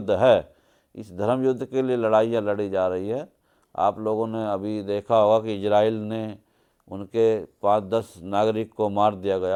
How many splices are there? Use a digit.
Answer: 0